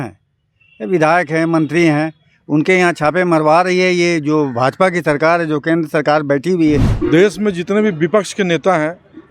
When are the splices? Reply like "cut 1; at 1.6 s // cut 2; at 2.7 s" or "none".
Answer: cut 1; at 6.9 s